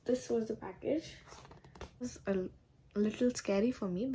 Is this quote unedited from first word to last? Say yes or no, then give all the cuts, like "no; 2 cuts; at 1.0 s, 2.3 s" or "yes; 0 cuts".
no; 1 cut; at 2.0 s